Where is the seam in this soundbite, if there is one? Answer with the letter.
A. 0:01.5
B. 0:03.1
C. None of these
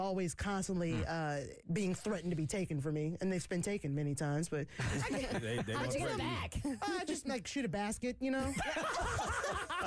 A